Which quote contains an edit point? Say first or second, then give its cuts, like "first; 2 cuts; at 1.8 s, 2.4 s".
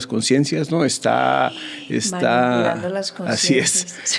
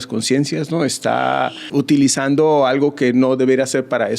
second; 1 cut; at 1.6 s